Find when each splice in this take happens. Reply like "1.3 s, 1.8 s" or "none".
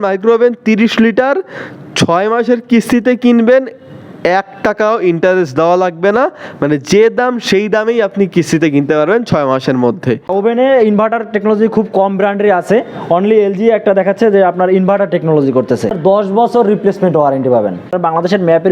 10.3 s, 16.0 s, 17.9 s